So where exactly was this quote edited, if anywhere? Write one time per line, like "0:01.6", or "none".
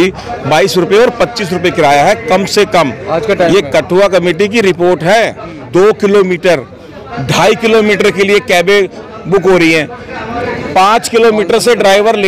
0:05.6